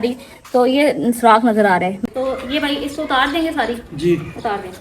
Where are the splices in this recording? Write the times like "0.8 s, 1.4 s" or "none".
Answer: 2.1 s